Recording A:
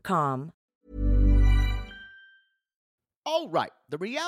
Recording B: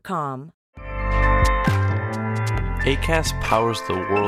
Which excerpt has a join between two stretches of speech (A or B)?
B